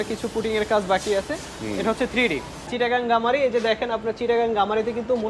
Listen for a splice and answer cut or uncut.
cut